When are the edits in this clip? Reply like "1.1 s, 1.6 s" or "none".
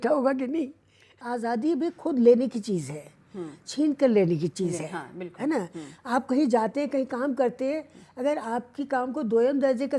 1.2 s